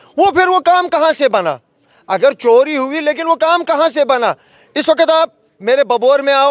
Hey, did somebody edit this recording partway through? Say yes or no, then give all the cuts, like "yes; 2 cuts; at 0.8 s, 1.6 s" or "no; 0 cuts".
no; 0 cuts